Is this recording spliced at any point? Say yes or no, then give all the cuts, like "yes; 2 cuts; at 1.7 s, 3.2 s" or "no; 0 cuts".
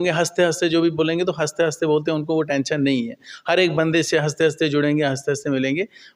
no; 0 cuts